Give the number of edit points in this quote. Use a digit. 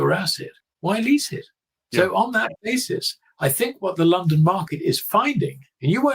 0